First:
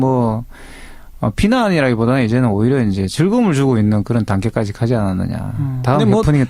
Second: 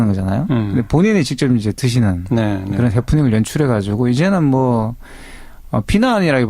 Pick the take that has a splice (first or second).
second